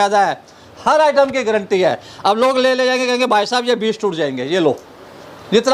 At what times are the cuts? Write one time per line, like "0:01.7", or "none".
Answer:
none